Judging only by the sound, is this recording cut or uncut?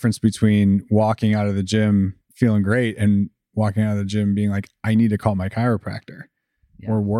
cut